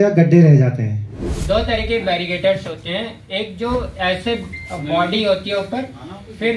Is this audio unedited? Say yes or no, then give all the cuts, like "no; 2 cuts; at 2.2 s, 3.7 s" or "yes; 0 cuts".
no; 1 cut; at 1.3 s